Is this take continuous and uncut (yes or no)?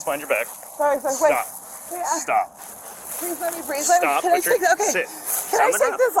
yes